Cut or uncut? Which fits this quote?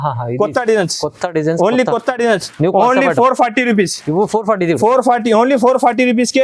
uncut